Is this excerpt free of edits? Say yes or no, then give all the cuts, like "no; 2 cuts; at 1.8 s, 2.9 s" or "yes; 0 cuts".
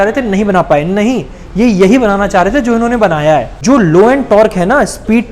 no; 1 cut; at 3.5 s